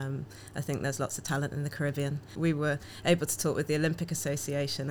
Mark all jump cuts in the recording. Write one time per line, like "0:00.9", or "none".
0:02.3